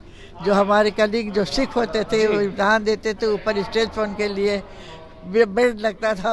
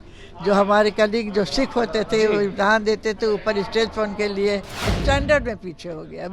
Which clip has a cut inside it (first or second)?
second